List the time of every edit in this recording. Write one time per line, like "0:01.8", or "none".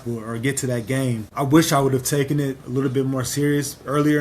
0:01.3